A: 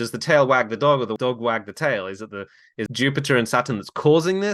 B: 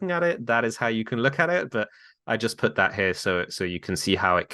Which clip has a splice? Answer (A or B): A